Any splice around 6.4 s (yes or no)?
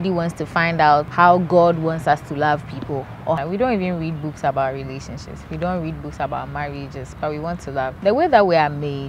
no